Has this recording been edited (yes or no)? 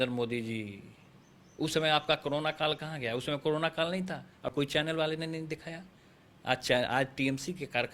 no